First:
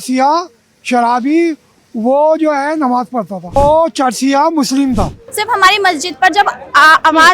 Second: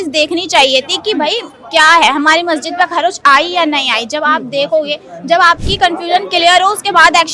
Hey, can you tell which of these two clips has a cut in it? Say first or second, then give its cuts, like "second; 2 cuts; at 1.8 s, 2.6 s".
first; 2 cuts; at 3.6 s, 5.2 s